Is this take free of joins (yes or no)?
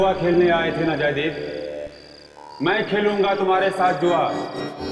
yes